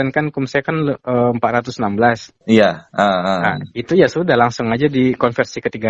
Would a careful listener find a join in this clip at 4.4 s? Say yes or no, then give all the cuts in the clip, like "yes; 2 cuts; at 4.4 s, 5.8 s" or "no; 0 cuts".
no; 0 cuts